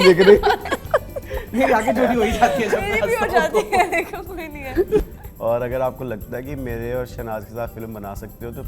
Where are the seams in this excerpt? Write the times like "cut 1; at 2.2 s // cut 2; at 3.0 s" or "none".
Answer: cut 1; at 5.0 s